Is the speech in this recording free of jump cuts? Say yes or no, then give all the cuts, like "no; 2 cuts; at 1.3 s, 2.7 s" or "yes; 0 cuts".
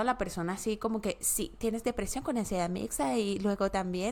yes; 0 cuts